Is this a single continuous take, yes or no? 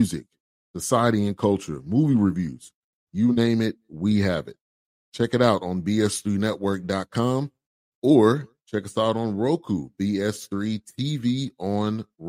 yes